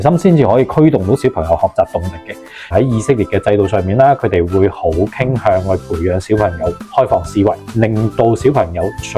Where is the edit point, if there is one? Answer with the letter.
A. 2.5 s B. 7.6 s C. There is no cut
A